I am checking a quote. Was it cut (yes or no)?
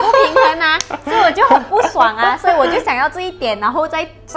no